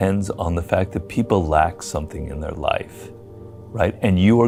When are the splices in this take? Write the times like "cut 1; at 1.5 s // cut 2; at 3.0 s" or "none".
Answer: none

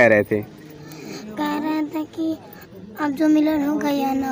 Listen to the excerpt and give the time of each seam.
none

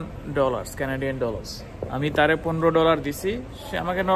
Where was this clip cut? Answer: none

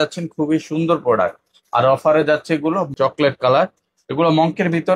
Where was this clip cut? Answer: cut 1; at 2.9 s

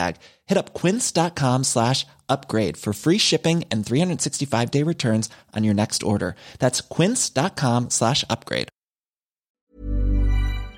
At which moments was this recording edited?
cut 1; at 9.6 s

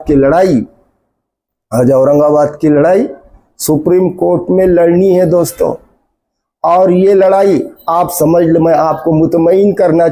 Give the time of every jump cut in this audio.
none

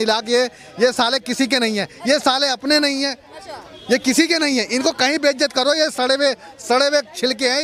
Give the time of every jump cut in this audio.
none

